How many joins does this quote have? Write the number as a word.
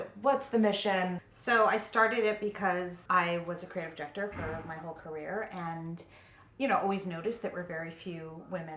two